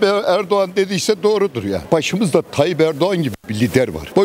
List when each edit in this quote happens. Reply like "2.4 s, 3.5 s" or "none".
1.8 s